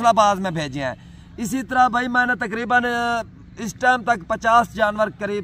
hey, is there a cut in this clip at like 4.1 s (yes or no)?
no